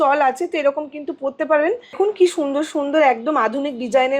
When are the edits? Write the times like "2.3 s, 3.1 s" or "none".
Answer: 2.0 s